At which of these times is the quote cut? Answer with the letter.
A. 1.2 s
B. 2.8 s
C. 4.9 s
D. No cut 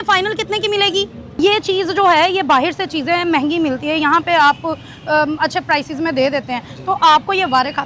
A